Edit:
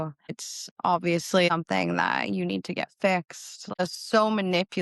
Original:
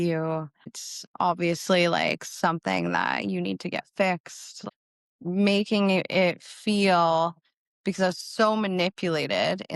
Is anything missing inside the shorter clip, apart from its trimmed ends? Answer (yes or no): yes